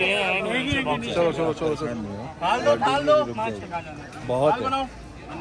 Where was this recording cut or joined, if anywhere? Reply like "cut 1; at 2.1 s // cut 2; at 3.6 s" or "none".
none